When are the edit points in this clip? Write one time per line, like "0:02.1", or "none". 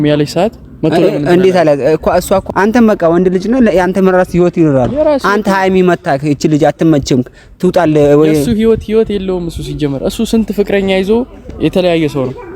0:02.4